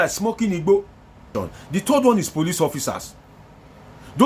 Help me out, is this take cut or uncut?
cut